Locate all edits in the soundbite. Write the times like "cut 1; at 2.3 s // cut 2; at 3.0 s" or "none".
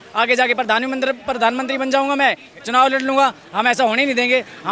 none